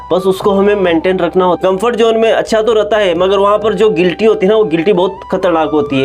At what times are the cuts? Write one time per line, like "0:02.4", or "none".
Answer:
0:01.6

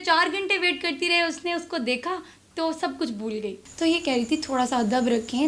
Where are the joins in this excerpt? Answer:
0:03.6

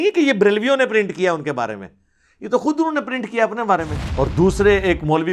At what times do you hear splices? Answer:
0:04.0

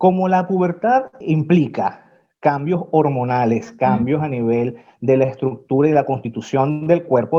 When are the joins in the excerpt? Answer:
0:01.2

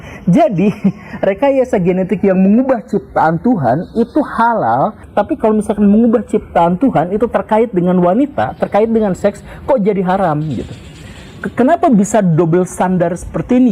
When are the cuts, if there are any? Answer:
0:05.0

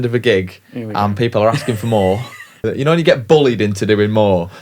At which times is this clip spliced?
0:02.5

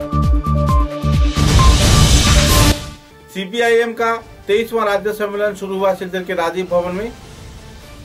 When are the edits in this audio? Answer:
0:02.7

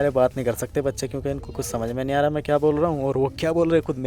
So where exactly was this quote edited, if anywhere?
none

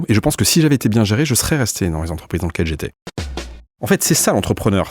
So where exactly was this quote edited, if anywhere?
0:03.4

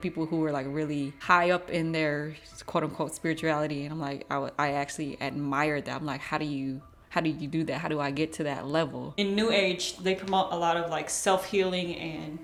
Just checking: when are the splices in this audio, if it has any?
none

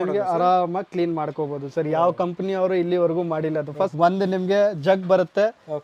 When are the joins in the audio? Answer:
0:03.9

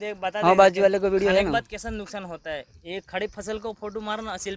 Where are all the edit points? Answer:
none

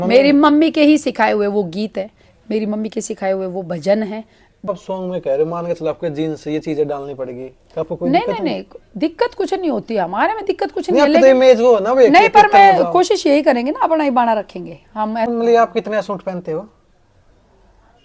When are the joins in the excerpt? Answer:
0:04.7
0:15.3

